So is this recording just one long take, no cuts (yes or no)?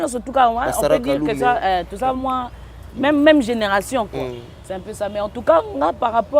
yes